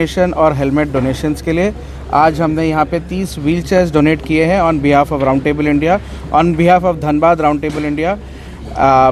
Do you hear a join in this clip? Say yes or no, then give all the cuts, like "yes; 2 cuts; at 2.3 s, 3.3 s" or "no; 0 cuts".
no; 0 cuts